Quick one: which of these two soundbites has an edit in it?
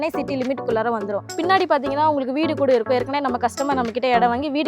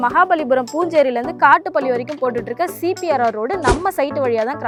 first; 1 cut; at 1.3 s

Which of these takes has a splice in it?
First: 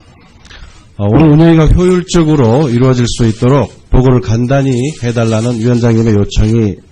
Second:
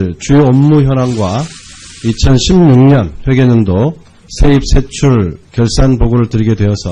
first; 1 cut; at 1.2 s

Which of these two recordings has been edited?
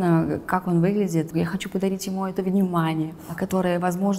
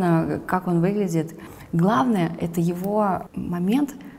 first; 2 cuts; at 1.3 s, 3.3 s

